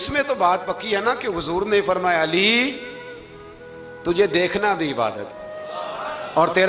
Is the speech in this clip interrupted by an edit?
no; 0 cuts

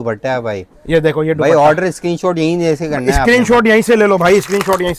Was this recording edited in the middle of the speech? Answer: no; 0 cuts

